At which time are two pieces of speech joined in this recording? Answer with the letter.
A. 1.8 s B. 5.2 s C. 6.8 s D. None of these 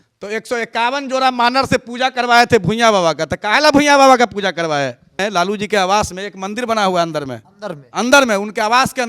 B